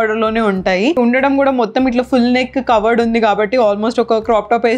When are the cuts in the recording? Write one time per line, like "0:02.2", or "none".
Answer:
0:01.0

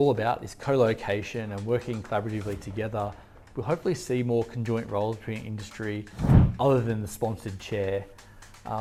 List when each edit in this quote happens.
none

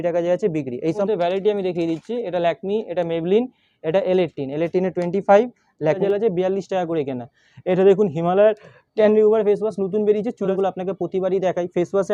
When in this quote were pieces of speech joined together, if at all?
0:01.0
0:06.0
0:10.5

